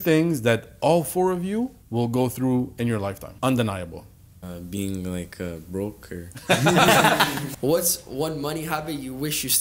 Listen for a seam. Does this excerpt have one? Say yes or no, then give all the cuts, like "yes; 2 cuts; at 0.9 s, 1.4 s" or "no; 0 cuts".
yes; 4 cuts; at 1.8 s, 3.3 s, 4.3 s, 7.4 s